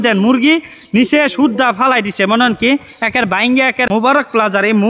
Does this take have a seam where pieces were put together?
yes; 1 cut; at 3.9 s

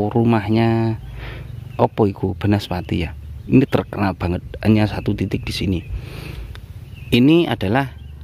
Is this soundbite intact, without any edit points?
no; 1 cut; at 6.2 s

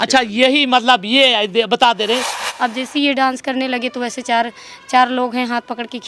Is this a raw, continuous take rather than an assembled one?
no; 1 cut; at 2.4 s

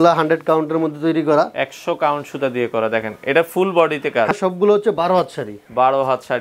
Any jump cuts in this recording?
yes; 1 cut; at 4.3 s

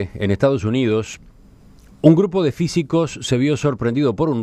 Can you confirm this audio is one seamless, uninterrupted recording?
yes; 0 cuts

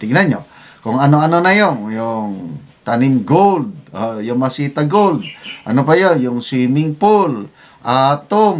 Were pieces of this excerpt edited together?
no; 0 cuts

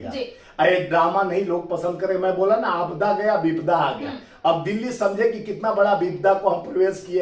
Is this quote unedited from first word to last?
yes; 0 cuts

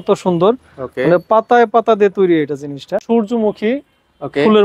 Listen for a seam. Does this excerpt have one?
yes; 1 cut; at 3.0 s

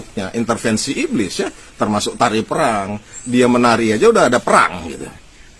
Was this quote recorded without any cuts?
yes; 0 cuts

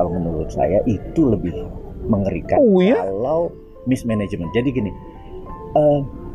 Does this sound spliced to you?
no; 0 cuts

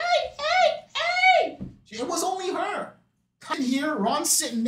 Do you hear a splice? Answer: yes; 1 cut; at 3.6 s

